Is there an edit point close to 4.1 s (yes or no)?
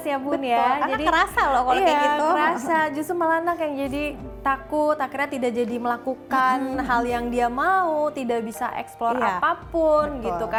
no